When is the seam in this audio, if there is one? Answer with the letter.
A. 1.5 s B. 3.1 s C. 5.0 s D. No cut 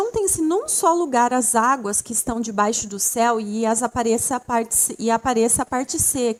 D